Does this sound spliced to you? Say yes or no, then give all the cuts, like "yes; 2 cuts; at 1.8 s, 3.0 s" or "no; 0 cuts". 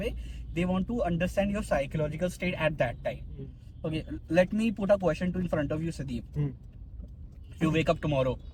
no; 0 cuts